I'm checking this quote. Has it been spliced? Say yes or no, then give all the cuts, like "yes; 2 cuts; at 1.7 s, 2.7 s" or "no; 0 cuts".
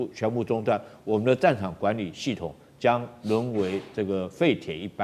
no; 0 cuts